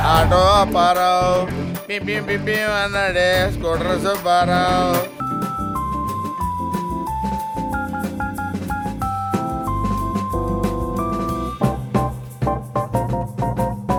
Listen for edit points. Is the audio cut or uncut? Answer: uncut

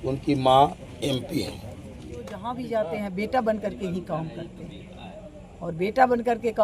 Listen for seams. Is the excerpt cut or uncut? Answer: cut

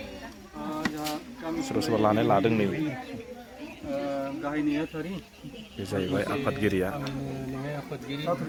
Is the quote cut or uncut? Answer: uncut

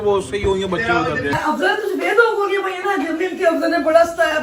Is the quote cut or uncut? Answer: cut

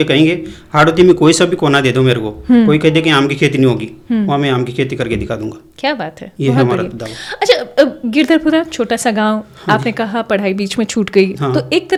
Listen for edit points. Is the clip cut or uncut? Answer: uncut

